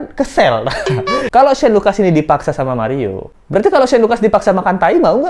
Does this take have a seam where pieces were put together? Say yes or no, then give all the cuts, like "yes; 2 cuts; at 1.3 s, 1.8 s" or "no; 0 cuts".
yes; 1 cut; at 1.2 s